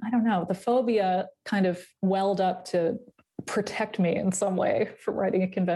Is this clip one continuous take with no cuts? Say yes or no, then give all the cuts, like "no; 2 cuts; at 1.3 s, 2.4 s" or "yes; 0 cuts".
no; 1 cut; at 1.9 s